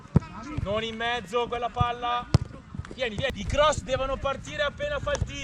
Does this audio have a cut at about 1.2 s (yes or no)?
no